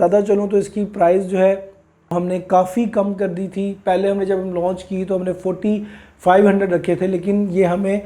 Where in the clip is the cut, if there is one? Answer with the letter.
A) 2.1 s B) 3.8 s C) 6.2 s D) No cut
A